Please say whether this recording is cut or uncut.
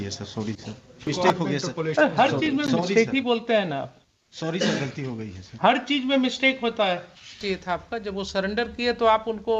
cut